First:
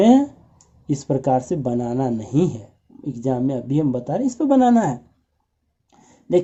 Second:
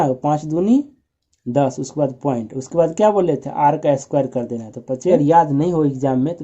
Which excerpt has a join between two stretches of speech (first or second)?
second